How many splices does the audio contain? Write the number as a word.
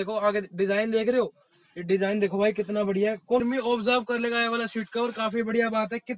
one